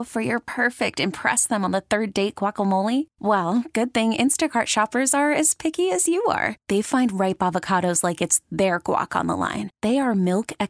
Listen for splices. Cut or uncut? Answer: uncut